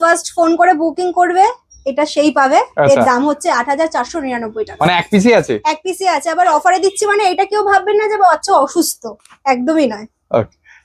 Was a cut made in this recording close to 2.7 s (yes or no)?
no